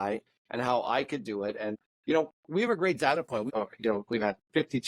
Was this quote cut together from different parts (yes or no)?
yes